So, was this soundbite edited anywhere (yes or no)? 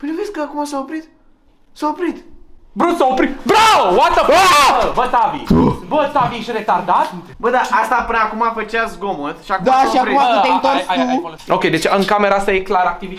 no